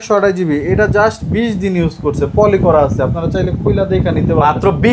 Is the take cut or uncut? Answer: uncut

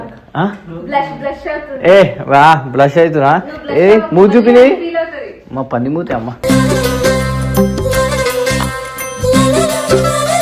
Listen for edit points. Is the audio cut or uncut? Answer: uncut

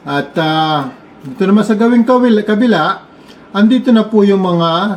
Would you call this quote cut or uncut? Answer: uncut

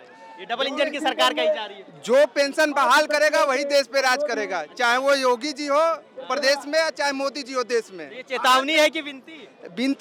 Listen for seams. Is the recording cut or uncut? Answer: uncut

